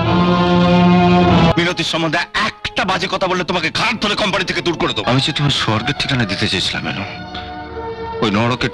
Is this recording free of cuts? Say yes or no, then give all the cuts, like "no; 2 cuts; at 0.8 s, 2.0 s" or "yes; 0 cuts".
no; 2 cuts; at 1.5 s, 5.0 s